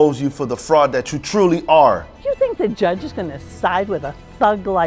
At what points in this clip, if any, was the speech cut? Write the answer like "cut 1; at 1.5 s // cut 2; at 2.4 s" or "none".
cut 1; at 2.1 s